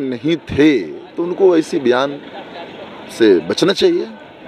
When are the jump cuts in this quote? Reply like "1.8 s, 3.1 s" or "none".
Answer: none